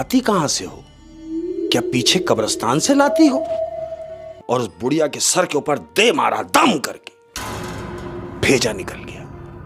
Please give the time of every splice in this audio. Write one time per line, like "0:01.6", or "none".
0:04.3